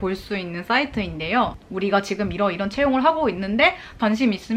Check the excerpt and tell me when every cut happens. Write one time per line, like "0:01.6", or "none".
0:01.5